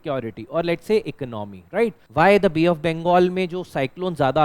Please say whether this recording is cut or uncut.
cut